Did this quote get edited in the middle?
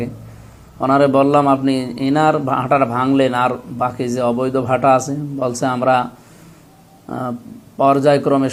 no; 0 cuts

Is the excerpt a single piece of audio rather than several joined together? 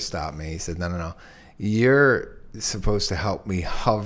yes; 0 cuts

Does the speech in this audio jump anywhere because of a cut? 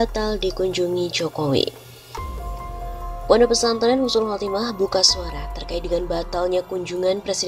yes; 2 cuts; at 1.9 s, 3.3 s

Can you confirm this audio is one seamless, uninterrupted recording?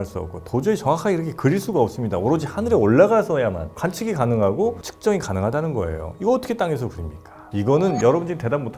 yes; 0 cuts

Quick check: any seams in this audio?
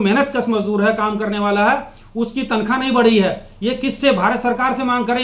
no; 0 cuts

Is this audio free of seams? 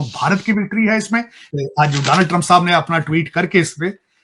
no; 1 cut; at 1.4 s

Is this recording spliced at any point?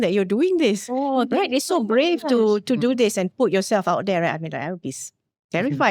no; 0 cuts

